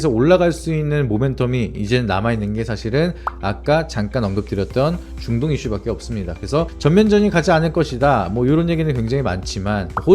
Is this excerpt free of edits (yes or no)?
yes